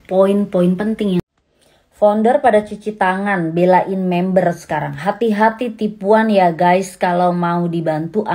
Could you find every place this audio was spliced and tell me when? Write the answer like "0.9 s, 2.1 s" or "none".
1.2 s